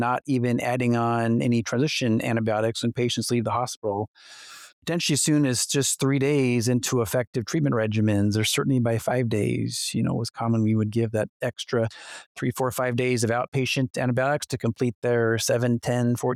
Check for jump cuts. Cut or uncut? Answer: uncut